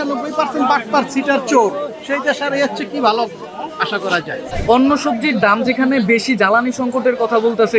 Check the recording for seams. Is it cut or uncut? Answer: cut